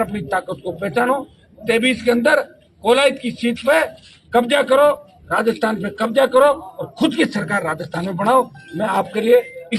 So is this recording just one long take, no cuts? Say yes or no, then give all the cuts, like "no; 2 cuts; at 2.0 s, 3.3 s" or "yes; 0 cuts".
yes; 0 cuts